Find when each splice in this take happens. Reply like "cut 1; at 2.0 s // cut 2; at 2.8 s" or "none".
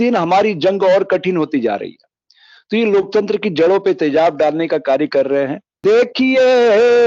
cut 1; at 5.7 s